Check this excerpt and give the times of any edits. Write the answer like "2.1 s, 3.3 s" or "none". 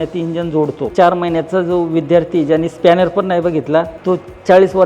0.9 s, 3.9 s